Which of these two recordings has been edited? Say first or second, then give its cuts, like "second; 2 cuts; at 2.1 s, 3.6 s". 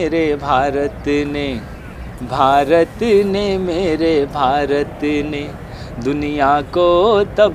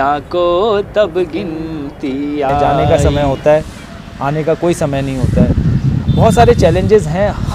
second; 1 cut; at 2.9 s